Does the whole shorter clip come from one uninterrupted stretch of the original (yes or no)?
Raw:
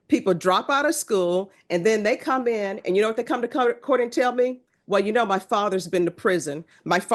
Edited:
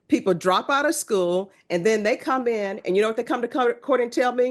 yes